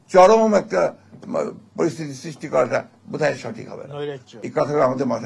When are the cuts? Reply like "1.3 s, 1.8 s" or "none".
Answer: 4.3 s